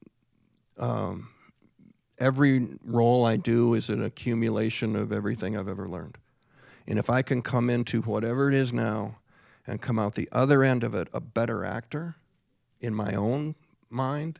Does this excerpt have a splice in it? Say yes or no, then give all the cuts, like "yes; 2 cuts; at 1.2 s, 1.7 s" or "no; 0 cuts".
no; 0 cuts